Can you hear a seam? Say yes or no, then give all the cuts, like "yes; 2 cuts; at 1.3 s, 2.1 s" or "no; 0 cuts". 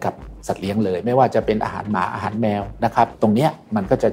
yes; 1 cut; at 3.1 s